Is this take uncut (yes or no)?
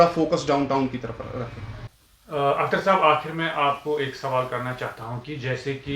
yes